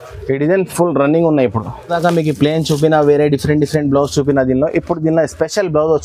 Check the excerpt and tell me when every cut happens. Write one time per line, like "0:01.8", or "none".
0:01.9

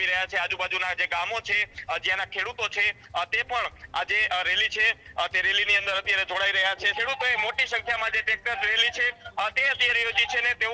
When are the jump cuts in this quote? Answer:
0:06.9

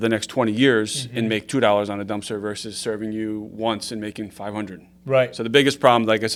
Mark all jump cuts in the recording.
none

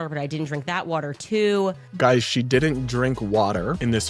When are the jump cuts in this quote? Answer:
0:01.9

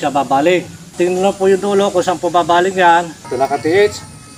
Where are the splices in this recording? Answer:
0:00.9
0:03.3

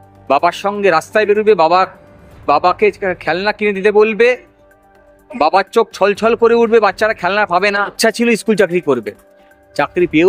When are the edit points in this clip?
0:08.0

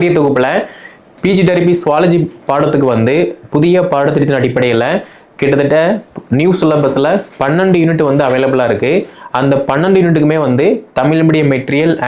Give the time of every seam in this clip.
none

